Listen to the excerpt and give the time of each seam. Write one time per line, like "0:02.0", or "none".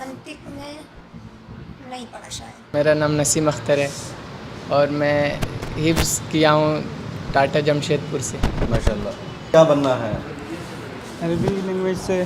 0:02.6
0:09.5